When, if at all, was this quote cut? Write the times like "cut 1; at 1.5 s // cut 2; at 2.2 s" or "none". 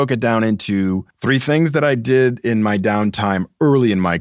cut 1; at 1.1 s